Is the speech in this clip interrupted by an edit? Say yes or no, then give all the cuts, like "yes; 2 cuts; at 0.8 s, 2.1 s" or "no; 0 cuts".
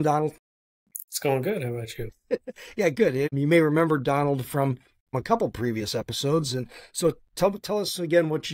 yes; 2 cuts; at 3.3 s, 5.1 s